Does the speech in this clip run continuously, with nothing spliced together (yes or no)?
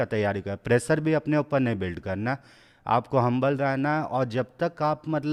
yes